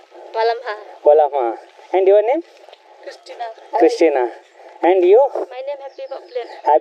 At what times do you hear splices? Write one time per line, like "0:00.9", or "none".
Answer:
none